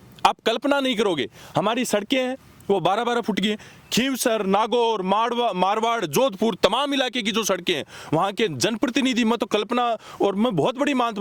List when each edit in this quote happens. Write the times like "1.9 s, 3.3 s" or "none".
none

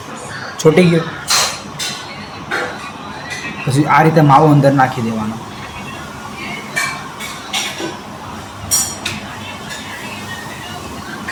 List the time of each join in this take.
none

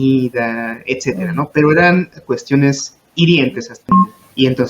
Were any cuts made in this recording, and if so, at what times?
3.8 s

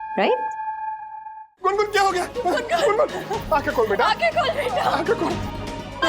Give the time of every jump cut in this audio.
1.5 s

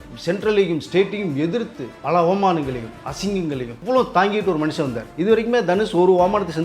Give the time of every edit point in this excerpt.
1.9 s, 3.7 s, 5.1 s

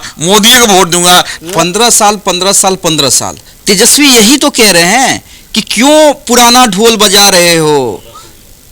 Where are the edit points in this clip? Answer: 1.3 s

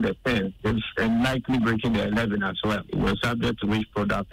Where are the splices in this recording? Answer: none

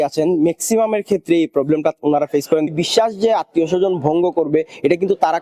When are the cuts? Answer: 2.7 s

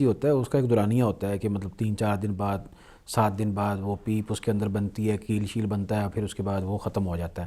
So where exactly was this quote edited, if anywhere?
none

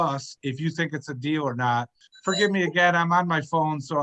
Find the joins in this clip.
2.1 s

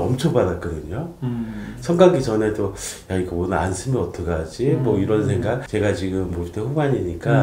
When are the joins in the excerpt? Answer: none

